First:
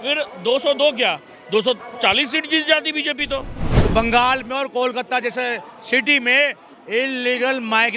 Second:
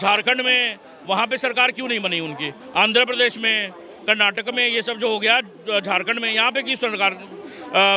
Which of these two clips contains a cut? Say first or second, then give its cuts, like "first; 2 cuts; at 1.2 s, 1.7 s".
first; 1 cut; at 3.8 s